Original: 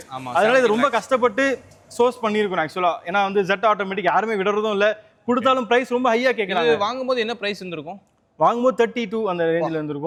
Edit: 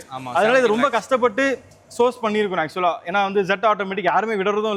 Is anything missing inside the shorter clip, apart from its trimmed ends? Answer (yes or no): no